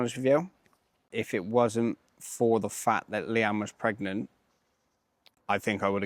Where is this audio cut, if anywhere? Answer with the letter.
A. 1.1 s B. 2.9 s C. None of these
A